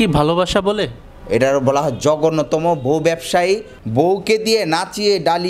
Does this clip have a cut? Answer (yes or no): yes